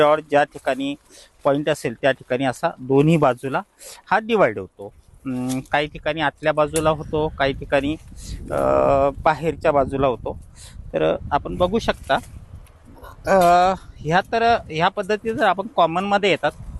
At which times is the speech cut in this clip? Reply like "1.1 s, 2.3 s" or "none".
none

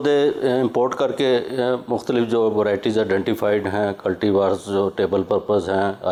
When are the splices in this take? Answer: none

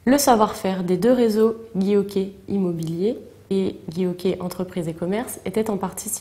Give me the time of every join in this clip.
3.3 s

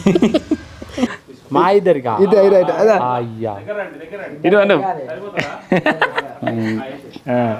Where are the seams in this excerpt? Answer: 1.3 s

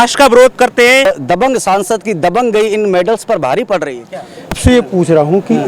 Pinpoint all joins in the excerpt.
1.0 s, 4.6 s

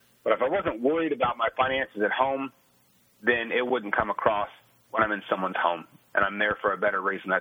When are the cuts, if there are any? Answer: none

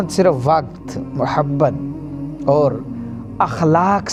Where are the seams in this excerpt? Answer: none

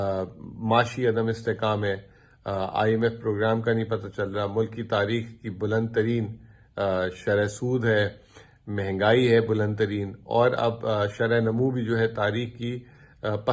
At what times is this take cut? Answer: none

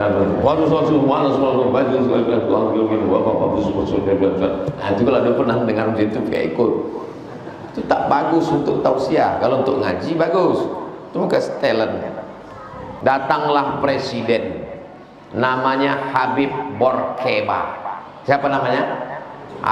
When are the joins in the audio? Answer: 12.9 s

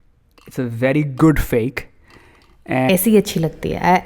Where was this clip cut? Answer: 2.9 s

